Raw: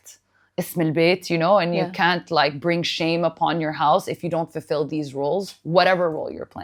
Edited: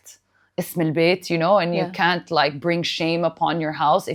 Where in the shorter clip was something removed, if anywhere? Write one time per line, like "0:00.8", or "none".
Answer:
none

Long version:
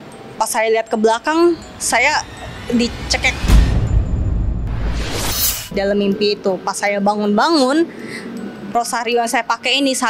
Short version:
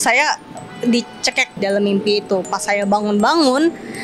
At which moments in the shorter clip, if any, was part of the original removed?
0:01.5

